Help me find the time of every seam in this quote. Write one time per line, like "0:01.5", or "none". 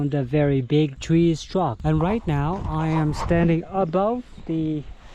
0:01.0
0:01.8